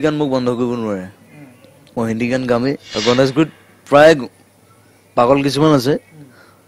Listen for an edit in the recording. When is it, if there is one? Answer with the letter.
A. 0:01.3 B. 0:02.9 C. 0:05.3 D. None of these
B